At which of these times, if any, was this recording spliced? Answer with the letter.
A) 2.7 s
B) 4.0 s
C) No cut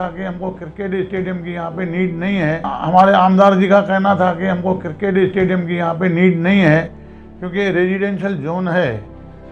A